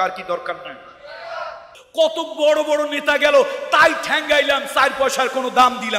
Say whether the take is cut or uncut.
cut